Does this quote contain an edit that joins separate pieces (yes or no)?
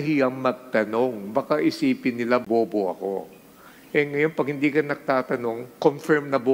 no